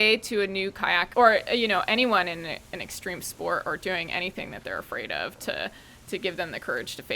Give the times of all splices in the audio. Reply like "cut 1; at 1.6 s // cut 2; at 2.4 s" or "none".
cut 1; at 1.1 s